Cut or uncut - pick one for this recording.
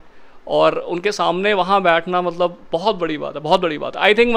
uncut